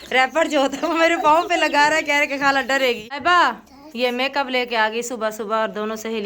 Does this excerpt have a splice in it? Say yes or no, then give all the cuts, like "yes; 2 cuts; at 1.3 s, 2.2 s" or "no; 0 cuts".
yes; 1 cut; at 3.2 s